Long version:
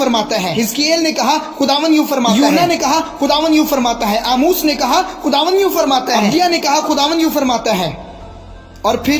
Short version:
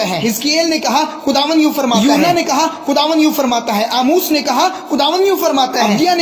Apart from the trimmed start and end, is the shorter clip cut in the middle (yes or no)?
no